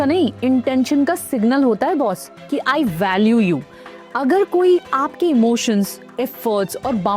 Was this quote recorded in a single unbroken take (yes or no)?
yes